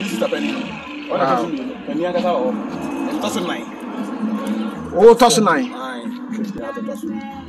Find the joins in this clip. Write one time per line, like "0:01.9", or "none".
0:06.6